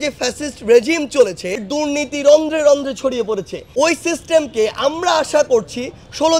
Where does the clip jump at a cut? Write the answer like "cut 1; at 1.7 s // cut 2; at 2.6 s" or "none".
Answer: cut 1; at 1.6 s // cut 2; at 3.6 s